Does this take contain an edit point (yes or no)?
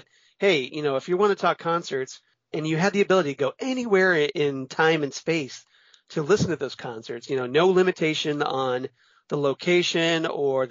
yes